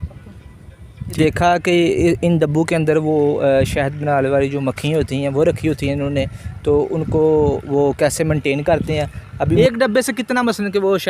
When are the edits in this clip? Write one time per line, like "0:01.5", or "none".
0:01.2
0:09.6